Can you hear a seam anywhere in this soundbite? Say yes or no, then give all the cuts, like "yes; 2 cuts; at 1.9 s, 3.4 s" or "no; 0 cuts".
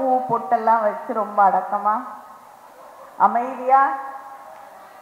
no; 0 cuts